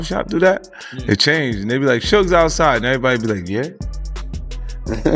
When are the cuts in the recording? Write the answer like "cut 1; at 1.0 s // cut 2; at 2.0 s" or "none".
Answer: none

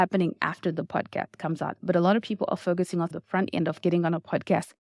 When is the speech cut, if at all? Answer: cut 1; at 3.1 s

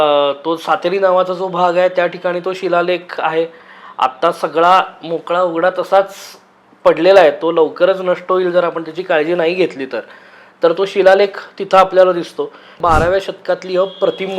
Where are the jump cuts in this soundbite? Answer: cut 1; at 12.7 s

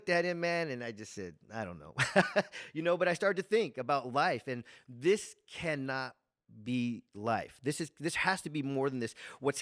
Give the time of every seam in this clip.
none

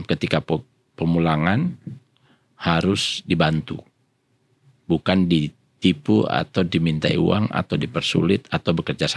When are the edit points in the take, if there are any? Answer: none

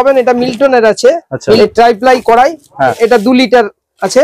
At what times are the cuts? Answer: cut 1; at 1.6 s // cut 2; at 3.0 s

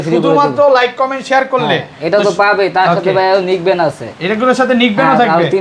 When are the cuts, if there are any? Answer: none

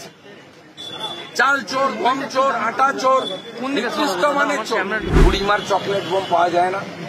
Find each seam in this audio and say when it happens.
cut 1; at 5.1 s

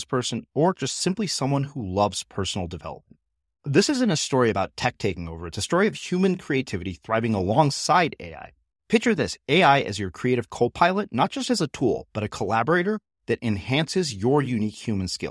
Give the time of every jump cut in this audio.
none

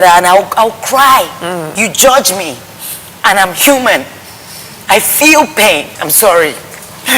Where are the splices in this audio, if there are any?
cut 1; at 1.7 s // cut 2; at 6.0 s

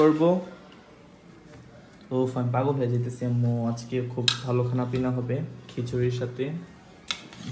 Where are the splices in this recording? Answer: none

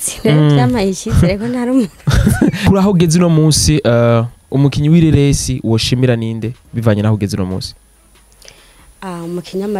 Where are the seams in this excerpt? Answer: cut 1; at 2.6 s

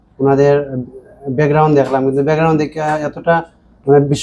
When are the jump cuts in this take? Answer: none

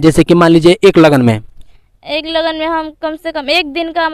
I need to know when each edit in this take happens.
none

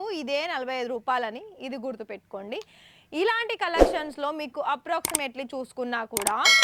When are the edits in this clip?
none

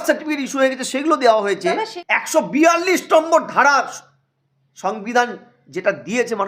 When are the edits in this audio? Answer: cut 1; at 1.9 s

